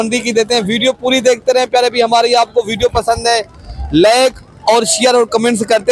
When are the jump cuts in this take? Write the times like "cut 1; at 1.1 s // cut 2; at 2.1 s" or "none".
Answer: none